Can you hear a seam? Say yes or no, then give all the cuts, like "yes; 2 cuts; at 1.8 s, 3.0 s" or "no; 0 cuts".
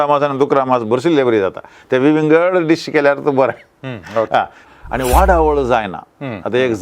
yes; 1 cut; at 4.6 s